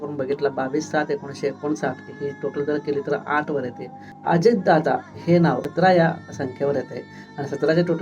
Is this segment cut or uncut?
cut